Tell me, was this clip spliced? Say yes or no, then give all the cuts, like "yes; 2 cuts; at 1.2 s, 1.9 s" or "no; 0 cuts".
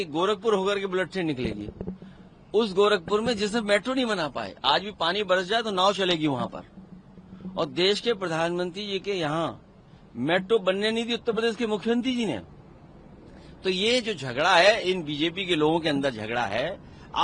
no; 0 cuts